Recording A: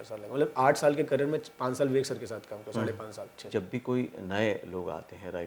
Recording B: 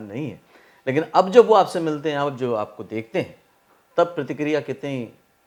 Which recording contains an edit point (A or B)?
A